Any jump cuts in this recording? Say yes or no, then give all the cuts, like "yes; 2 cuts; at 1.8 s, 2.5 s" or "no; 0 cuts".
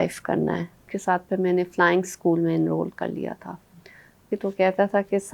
yes; 2 cuts; at 0.9 s, 4.2 s